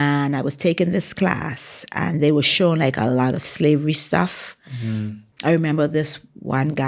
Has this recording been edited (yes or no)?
yes